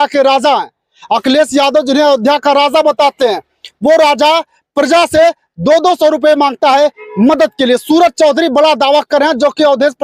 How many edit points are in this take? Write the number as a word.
zero